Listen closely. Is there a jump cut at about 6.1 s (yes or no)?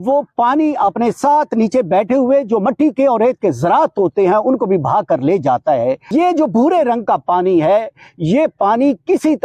yes